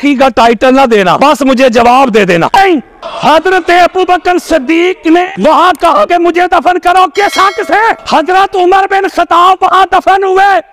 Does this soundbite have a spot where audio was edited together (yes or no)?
yes